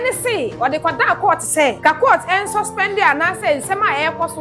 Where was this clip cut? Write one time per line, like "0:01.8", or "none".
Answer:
0:01.8

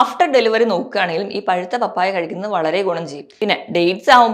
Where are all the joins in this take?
0:03.2

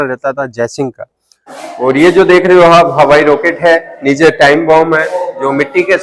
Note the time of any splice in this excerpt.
0:01.4

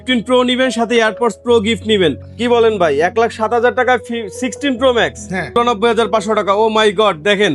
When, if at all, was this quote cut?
0:02.3
0:05.5

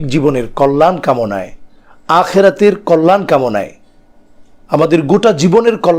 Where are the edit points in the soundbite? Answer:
none

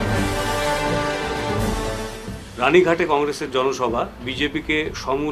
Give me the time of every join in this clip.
0:01.9

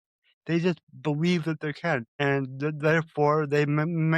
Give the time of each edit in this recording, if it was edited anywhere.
0:02.1

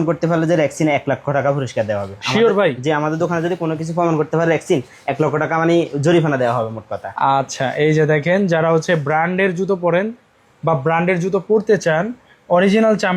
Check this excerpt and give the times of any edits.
none

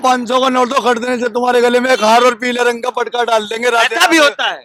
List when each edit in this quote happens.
none

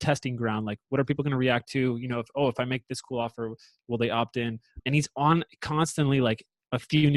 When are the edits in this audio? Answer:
0:04.8

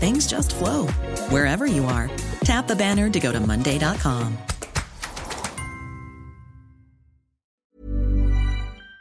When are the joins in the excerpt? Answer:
0:07.5

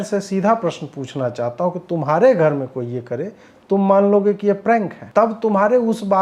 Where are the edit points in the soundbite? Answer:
0:05.0

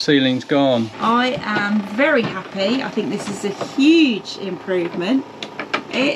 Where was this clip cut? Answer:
0:00.9

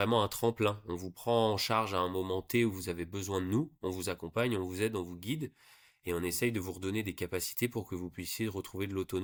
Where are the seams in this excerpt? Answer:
none

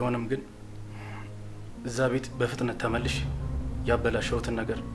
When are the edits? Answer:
none

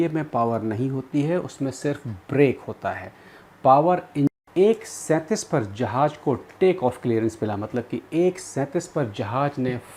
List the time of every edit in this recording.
0:04.3

